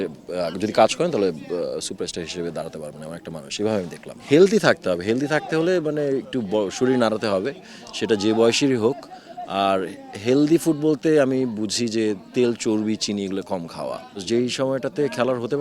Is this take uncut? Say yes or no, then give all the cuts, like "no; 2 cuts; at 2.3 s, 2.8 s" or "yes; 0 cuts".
no; 2 cuts; at 4.2 s, 14.2 s